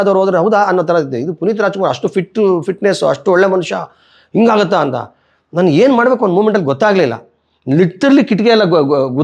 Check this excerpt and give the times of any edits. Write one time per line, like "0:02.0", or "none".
none